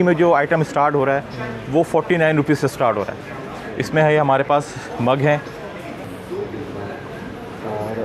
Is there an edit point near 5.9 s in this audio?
yes; 1 cut; at 5.9 s

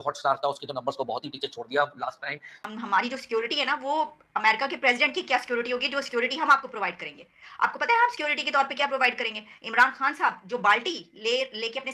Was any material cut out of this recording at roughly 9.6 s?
no; 1 cut; at 2.6 s

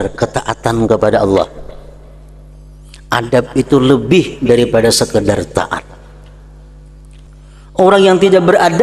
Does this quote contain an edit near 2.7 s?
no; 1 cut; at 7.3 s

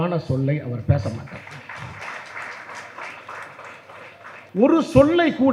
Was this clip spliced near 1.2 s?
no; 1 cut; at 4.4 s

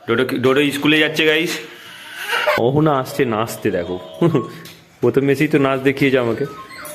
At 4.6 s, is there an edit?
no; 1 cut; at 2.6 s

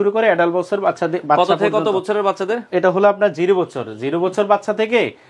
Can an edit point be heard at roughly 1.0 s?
no; 0 cuts

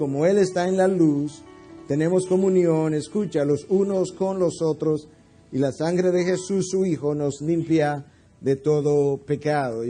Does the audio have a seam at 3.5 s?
no; 0 cuts

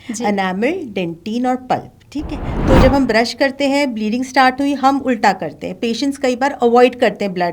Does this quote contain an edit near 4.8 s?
no; 1 cut; at 2.6 s

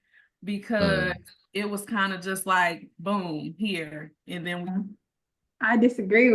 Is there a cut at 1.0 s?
no; 1 cut; at 4.7 s

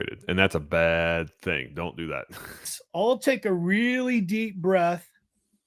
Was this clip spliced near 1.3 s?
no; 1 cut; at 2.8 s

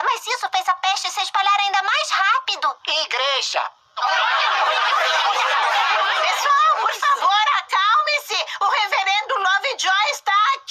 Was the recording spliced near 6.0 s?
no; 0 cuts

